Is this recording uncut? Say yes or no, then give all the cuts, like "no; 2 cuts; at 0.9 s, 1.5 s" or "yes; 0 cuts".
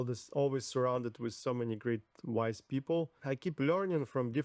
no; 1 cut; at 3.2 s